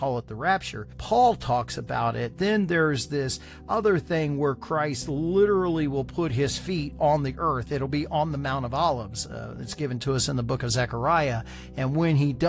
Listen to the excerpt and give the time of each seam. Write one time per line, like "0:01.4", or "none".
0:01.0